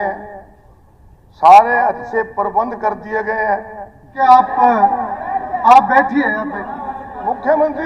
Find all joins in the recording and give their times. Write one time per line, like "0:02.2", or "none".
0:04.2